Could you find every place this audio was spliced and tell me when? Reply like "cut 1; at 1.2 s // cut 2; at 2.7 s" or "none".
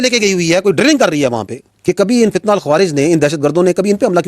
cut 1; at 1.7 s